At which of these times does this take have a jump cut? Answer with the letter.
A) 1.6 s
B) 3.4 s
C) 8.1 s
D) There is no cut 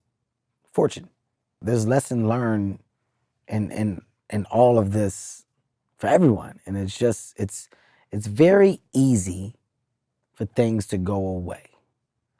A